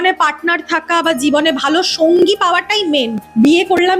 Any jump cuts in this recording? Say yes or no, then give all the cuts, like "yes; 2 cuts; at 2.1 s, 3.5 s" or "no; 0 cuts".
no; 0 cuts